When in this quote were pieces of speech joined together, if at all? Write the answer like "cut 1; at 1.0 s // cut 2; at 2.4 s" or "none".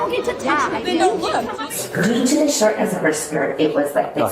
cut 1; at 1.7 s